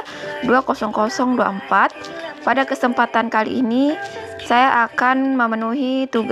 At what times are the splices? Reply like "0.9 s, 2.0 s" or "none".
none

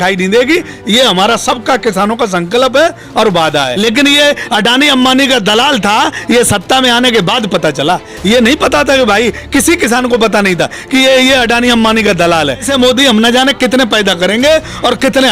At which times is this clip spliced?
3.7 s, 12.6 s

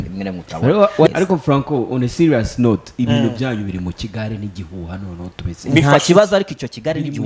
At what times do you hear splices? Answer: 1.1 s

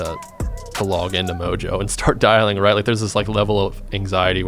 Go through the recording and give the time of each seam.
none

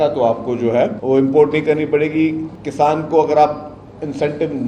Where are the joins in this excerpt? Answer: 1.0 s, 2.5 s

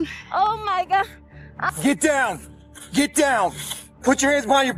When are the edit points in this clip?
1.5 s

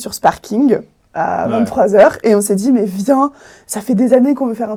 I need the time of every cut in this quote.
none

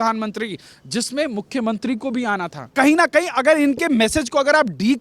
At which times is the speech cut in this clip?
2.7 s

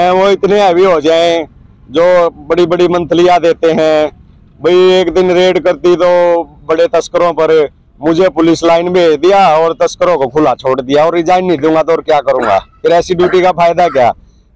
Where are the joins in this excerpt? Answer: none

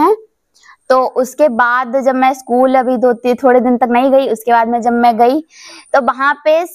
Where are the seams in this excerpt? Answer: none

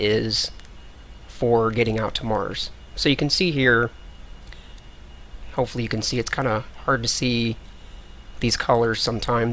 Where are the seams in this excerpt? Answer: none

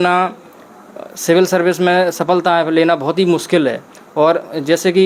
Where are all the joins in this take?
none

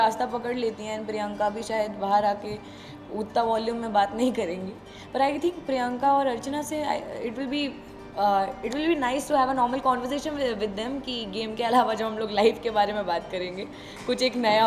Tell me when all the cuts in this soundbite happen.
none

